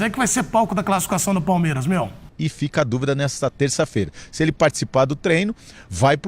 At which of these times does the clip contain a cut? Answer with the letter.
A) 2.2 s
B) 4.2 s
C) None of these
A